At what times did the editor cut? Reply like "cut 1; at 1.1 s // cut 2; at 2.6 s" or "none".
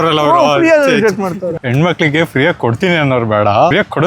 cut 1; at 1.6 s